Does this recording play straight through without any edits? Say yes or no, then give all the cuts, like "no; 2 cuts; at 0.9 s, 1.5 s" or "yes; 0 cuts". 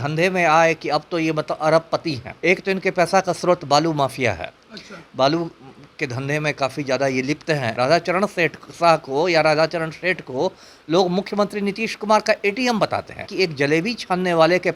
no; 3 cuts; at 2.3 s, 7.7 s, 13.3 s